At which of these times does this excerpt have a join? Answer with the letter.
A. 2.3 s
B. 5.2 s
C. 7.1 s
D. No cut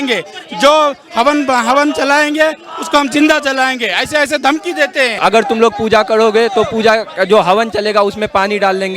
B